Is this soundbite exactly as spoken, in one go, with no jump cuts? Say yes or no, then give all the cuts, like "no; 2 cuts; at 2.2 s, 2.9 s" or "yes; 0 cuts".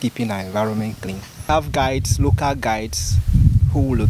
no; 1 cut; at 1.4 s